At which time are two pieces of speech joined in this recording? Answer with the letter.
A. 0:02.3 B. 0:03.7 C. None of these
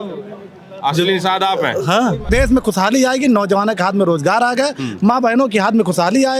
A